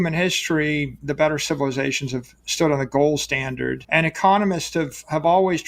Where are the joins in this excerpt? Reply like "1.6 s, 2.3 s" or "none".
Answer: 1.0 s, 3.8 s

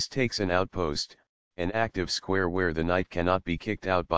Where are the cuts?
2.8 s

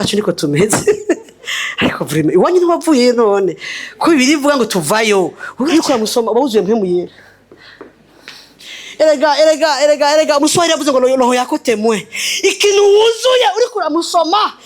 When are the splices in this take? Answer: 5.7 s

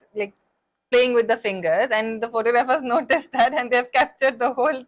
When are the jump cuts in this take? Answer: none

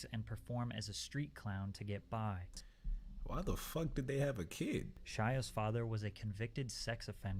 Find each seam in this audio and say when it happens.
2.6 s, 5.0 s

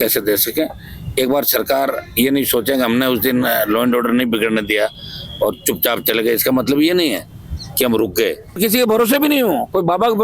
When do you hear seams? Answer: 8.6 s

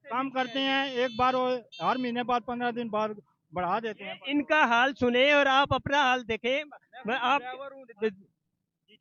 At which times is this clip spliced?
none

